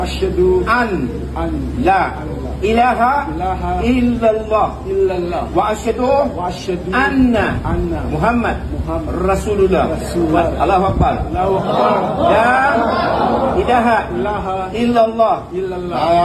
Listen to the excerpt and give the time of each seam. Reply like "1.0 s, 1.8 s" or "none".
none